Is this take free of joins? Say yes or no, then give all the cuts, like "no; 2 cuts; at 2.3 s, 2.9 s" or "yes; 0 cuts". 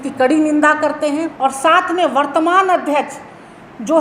no; 1 cut; at 1.3 s